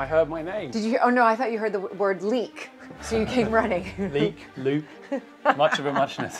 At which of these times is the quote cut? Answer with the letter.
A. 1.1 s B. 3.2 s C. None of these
C